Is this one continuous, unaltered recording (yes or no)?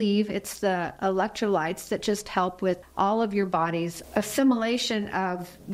no